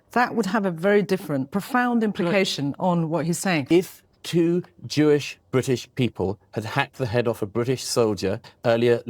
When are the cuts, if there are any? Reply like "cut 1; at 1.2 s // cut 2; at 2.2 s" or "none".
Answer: cut 1; at 3.6 s